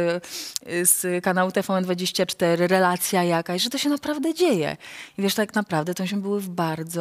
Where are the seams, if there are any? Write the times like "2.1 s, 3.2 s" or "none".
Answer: none